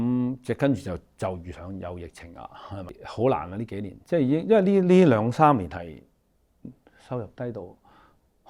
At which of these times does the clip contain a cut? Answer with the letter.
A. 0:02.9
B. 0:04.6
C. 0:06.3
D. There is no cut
A